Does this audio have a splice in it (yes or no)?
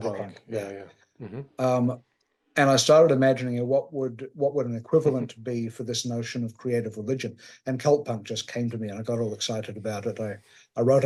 no